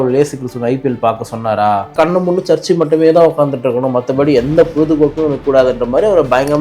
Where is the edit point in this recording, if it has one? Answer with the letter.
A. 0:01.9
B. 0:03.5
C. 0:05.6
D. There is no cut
A